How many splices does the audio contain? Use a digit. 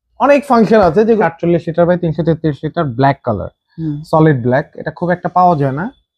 1